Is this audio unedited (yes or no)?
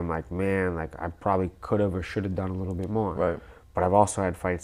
yes